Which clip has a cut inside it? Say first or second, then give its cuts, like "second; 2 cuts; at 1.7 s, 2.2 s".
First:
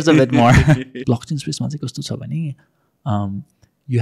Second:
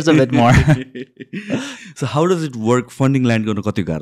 first; 1 cut; at 1.0 s